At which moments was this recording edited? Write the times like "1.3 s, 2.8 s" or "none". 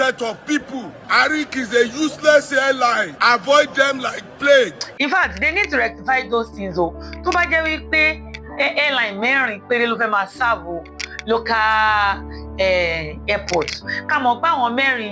0.9 s, 3.1 s